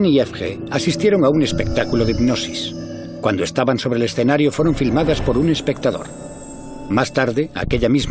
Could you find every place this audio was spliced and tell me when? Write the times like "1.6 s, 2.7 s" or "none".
2.2 s